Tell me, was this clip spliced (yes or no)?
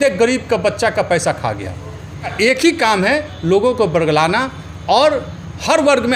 yes